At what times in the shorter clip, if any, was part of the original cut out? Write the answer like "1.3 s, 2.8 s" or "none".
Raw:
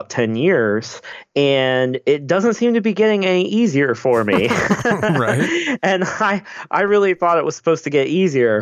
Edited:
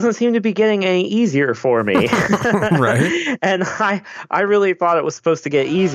none